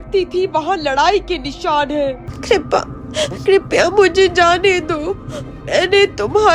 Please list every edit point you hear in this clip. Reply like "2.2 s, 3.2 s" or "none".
2.3 s